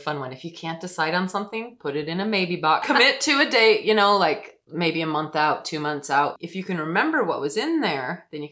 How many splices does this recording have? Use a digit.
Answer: 2